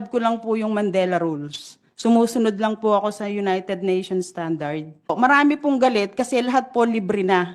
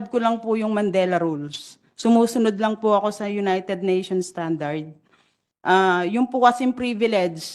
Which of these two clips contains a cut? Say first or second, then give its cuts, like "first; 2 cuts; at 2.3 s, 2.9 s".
first; 1 cut; at 5.1 s